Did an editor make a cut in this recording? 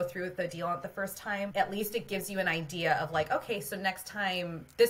yes; 1 cut; at 1.5 s

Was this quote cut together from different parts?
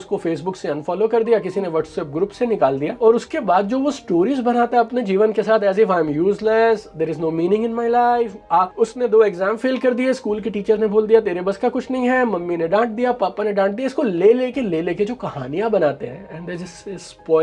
no; 0 cuts

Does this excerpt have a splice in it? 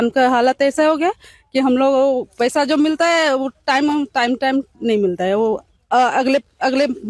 no; 0 cuts

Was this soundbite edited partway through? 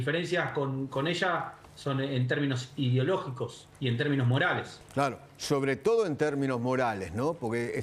yes; 1 cut; at 4.8 s

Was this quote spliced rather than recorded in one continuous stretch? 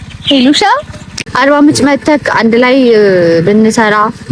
yes; 1 cut; at 1.2 s

